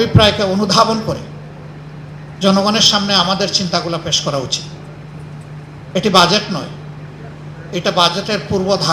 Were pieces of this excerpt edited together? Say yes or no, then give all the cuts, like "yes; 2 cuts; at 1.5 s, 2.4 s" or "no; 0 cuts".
no; 0 cuts